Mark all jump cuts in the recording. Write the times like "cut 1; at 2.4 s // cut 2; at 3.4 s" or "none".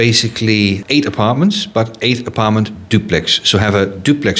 none